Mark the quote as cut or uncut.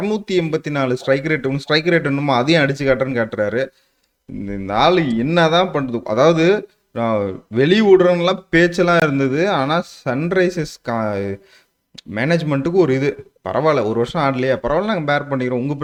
uncut